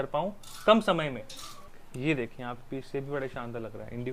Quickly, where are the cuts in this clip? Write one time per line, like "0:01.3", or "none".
0:01.8